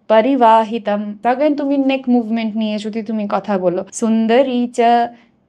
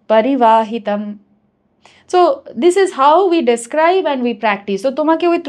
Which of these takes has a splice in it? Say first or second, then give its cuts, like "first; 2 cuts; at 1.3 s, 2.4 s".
first; 2 cuts; at 1.1 s, 3.9 s